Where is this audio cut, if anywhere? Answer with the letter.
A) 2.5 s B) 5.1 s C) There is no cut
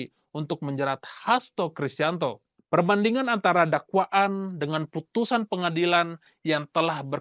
A